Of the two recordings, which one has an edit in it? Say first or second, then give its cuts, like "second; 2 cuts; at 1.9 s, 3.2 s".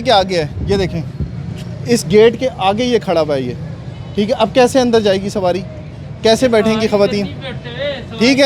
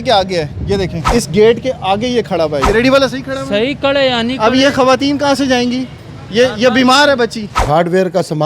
second; 3 cuts; at 1.0 s, 2.6 s, 7.6 s